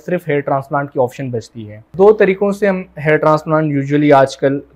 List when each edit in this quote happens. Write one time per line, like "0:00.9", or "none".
0:01.8

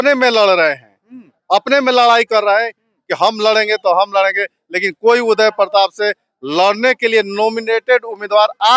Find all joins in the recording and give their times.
none

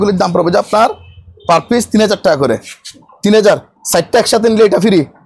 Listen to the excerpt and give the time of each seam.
none

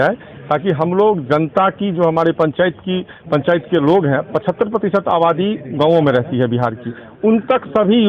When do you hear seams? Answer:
none

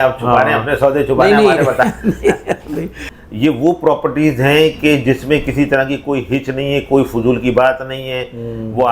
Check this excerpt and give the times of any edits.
0:02.9

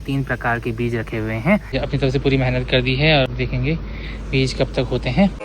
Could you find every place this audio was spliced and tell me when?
0:01.7

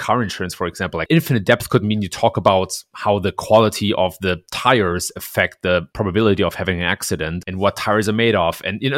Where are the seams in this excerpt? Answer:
0:05.9
0:07.4

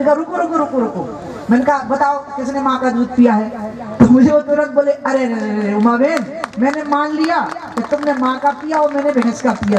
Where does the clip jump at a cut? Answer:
none

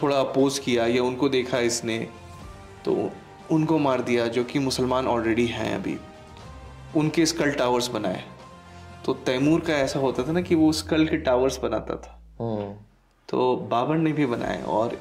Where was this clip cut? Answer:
none

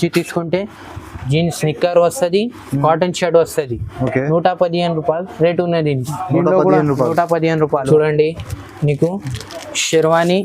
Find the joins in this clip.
0:07.9

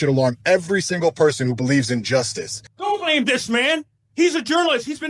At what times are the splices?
0:02.7
0:04.0

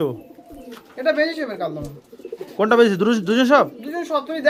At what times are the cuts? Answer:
none

